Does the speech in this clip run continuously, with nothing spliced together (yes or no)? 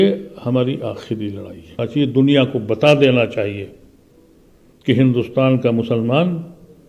no